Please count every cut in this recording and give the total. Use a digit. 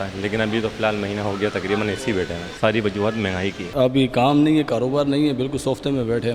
2